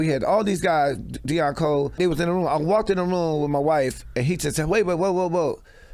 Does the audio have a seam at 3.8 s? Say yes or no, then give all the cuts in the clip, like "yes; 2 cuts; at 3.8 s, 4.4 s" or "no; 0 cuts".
no; 1 cut; at 2.0 s